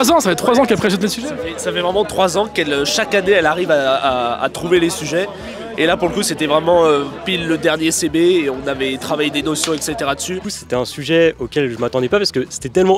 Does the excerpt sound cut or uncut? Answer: cut